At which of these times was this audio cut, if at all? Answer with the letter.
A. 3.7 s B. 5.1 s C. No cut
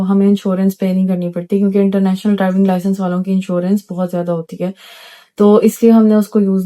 C